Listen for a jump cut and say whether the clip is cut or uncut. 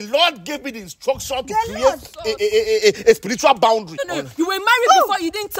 cut